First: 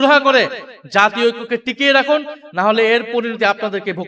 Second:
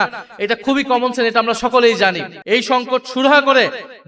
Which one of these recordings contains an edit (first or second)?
second